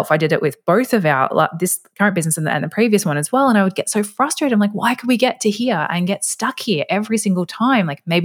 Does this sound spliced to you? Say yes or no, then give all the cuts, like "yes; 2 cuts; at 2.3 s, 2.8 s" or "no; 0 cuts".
no; 0 cuts